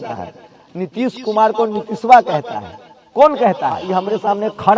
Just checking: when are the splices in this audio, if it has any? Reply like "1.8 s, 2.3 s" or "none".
3.9 s